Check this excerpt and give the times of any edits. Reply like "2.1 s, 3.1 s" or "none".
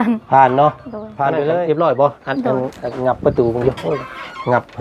1.4 s